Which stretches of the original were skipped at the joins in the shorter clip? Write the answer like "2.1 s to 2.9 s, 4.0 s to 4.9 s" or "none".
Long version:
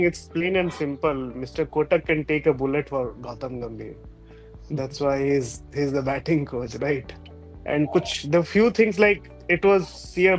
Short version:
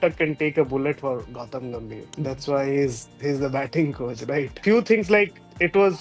3.9 s to 4.5 s, 7.1 s to 8.5 s